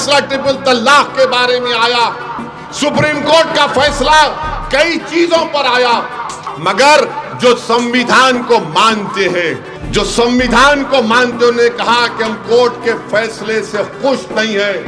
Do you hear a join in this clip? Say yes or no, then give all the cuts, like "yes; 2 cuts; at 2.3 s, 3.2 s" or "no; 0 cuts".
yes; 2 cuts; at 6.4 s, 9.7 s